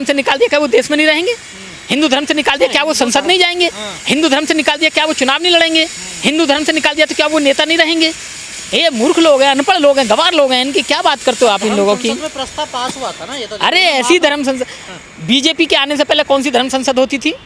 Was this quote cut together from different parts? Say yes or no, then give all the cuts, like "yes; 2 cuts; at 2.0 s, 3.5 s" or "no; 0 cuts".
no; 0 cuts